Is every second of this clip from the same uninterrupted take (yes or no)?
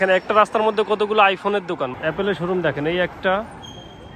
no